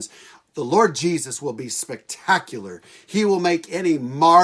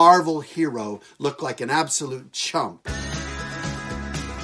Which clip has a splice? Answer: second; 1 cut; at 2.8 s

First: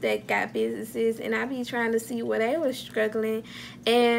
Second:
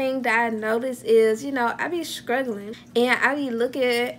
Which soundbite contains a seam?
second; 1 cut; at 2.7 s

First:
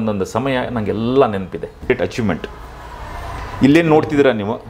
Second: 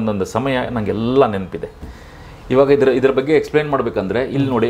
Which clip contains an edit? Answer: first; 1 cut; at 1.8 s

